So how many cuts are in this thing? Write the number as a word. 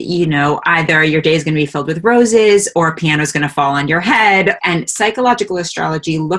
one